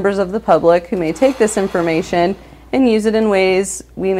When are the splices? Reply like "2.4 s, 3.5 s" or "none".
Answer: none